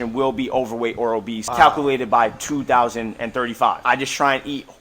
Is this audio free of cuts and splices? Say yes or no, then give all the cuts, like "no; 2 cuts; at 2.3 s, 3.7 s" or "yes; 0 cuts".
no; 2 cuts; at 1.4 s, 3.8 s